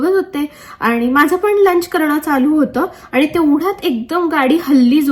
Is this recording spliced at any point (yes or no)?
no